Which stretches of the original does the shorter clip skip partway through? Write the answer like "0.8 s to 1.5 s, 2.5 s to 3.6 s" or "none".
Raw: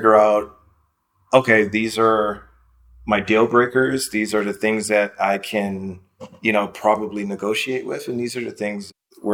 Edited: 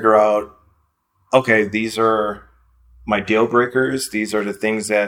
none